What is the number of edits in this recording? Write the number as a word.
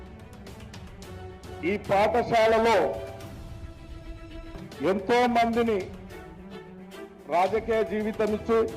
two